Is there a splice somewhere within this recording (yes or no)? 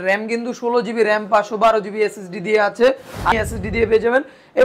yes